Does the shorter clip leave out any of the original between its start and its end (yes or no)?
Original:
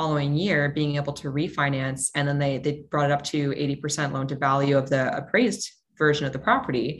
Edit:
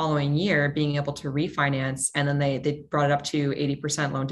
no